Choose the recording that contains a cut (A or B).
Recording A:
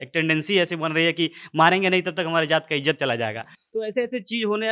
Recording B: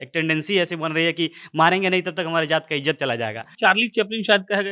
B